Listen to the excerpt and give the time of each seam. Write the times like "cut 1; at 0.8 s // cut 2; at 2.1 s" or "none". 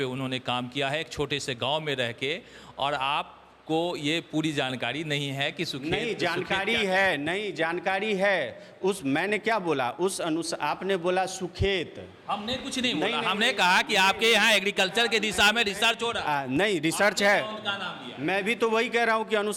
none